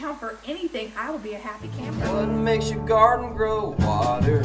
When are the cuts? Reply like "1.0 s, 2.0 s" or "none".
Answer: 1.9 s